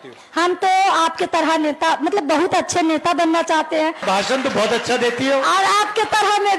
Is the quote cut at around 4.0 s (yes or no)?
yes